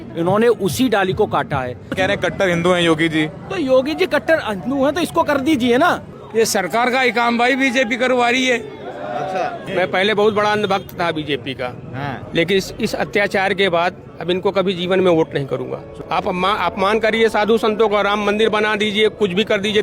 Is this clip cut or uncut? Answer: cut